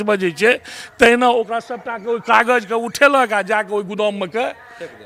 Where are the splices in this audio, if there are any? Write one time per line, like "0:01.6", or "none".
none